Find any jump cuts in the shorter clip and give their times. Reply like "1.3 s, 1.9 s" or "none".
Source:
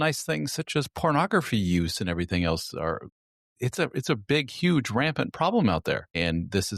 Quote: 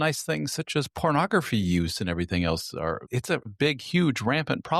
3.5 s